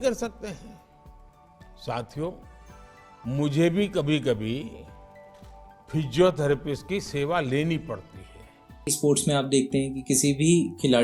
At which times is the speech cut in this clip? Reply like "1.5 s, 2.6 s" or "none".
8.9 s